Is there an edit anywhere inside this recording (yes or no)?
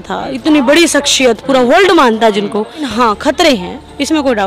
yes